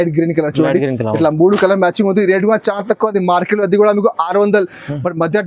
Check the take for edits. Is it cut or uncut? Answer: uncut